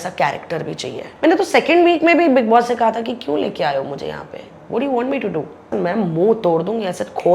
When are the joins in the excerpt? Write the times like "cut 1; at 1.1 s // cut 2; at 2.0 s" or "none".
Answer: cut 1; at 1.0 s // cut 2; at 5.7 s